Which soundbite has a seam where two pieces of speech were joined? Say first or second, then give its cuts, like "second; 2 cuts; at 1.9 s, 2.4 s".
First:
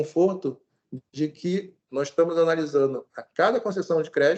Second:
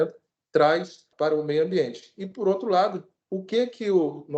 second; 1 cut; at 1.1 s